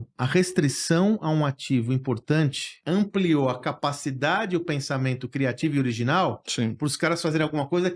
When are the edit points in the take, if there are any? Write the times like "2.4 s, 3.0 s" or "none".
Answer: 2.7 s

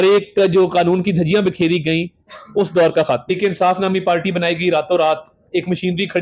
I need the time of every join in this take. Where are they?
3.3 s

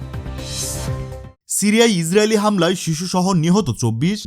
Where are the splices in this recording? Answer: 1.3 s

